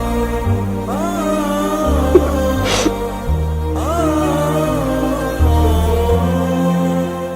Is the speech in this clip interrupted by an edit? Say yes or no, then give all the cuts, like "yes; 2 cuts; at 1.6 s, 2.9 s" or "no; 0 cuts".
no; 0 cuts